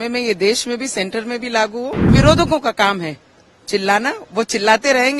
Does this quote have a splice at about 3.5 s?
no; 1 cut; at 2.1 s

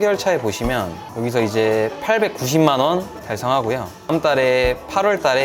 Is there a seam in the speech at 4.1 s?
yes; 1 cut; at 4.1 s

